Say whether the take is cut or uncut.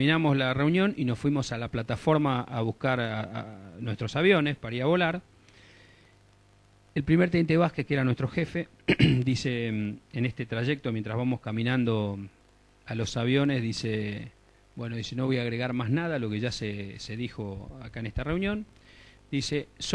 cut